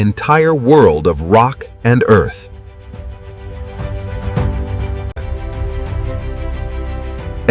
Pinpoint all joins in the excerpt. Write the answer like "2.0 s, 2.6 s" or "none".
5.2 s